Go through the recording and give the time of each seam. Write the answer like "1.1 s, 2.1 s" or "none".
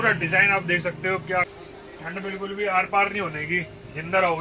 1.4 s